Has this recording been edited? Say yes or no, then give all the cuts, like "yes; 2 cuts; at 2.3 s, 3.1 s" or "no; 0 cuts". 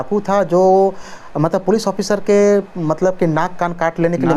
no; 0 cuts